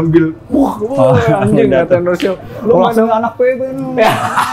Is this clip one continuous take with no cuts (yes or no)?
yes